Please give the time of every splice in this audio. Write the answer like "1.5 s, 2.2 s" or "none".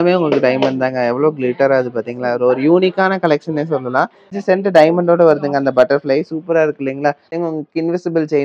4.3 s, 7.3 s